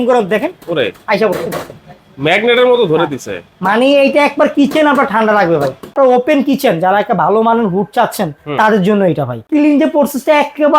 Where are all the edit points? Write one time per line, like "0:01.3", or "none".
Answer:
0:05.9
0:09.4